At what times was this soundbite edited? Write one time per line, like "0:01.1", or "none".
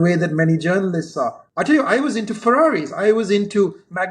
0:01.4